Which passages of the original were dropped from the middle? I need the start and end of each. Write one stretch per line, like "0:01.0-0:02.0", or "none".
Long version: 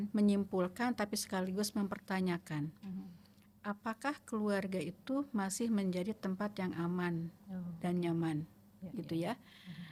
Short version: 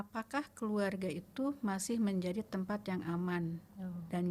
none

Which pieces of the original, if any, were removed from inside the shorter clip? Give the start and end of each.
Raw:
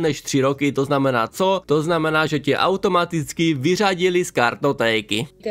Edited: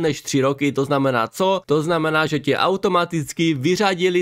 none

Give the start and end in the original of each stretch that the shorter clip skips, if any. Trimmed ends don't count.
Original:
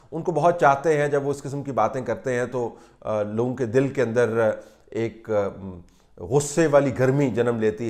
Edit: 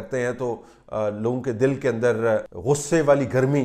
0:04.7-0:06.2

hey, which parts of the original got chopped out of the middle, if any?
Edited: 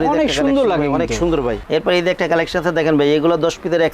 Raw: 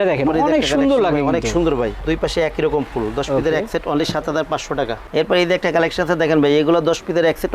0:02.0-0:05.1

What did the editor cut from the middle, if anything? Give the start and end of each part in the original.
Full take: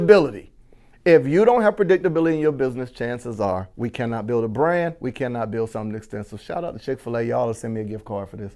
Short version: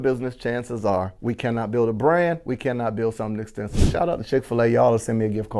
none

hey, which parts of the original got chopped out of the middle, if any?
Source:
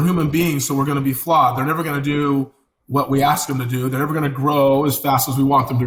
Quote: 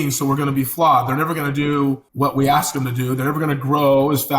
0:02.6-0:02.8

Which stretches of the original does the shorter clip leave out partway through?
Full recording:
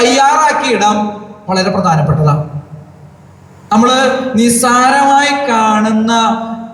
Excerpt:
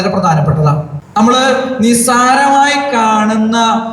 0:02.6-0:03.5

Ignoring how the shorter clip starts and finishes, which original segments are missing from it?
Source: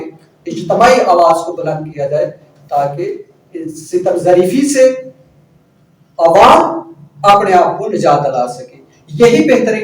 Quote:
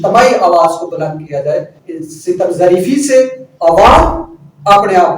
0:02.5-0:03.5
0:05.1-0:06.0

